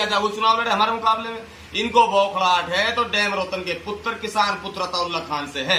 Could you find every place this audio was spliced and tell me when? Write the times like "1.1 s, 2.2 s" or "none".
none